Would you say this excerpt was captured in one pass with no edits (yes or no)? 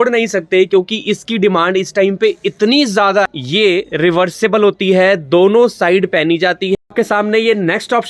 no